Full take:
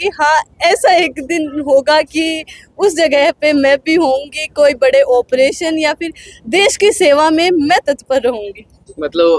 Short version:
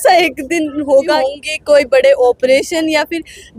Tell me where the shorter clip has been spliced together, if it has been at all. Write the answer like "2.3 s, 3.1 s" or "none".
1.2 s